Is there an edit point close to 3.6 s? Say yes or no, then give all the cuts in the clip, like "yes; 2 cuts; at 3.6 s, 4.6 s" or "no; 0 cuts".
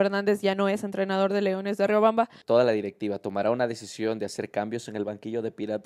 no; 1 cut; at 2.4 s